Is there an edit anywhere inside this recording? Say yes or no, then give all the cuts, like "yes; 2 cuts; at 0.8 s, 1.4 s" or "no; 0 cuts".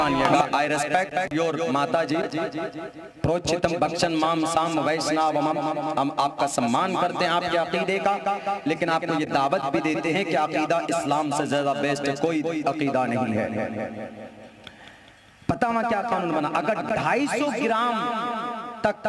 no; 0 cuts